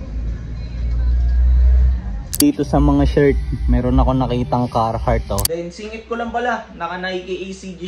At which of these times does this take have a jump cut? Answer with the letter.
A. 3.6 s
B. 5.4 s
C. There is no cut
B